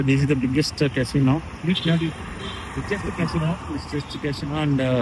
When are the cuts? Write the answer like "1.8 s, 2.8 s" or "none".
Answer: none